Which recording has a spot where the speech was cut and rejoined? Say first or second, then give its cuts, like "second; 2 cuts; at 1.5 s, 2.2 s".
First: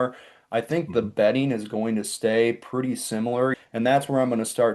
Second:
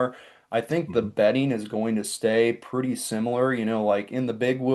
first; 1 cut; at 3.6 s